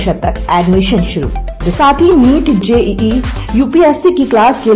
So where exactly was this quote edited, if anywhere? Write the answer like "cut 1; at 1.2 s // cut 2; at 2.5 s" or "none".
cut 1; at 1.7 s